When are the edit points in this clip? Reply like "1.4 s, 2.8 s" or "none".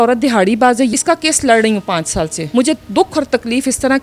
0.9 s, 2.4 s